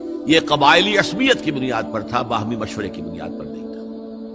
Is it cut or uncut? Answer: cut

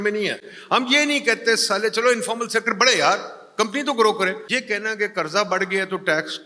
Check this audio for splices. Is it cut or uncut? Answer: cut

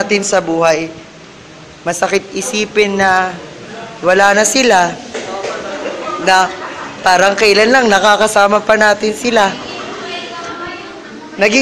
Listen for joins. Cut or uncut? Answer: uncut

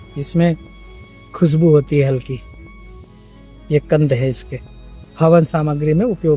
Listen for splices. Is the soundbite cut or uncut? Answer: uncut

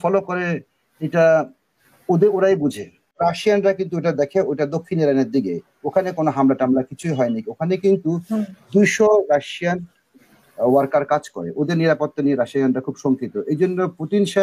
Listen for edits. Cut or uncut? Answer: cut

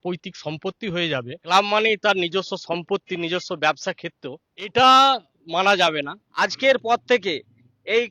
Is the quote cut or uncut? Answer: cut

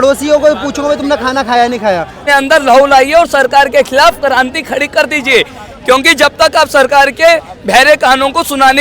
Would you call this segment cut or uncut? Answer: cut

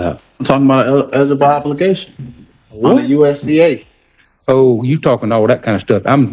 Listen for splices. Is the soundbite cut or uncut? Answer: uncut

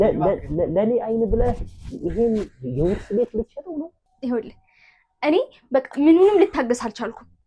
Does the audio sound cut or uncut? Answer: cut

